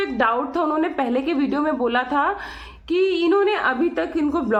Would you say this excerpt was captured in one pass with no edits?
yes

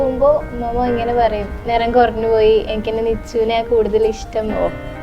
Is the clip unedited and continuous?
no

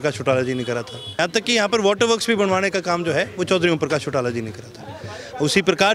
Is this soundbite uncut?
no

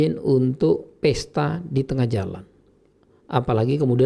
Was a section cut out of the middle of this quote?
no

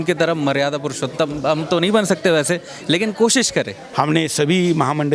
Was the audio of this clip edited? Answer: yes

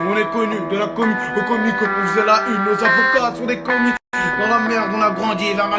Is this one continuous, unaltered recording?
yes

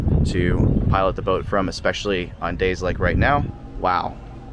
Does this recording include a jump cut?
yes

